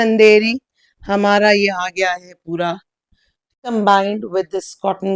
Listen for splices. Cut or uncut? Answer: cut